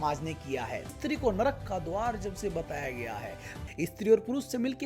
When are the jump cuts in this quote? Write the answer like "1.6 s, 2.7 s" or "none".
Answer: 0.9 s, 3.5 s